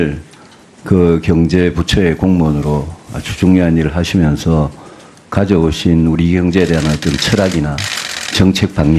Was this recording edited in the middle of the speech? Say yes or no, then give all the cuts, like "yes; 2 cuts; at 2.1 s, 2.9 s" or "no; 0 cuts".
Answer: yes; 1 cut; at 1.4 s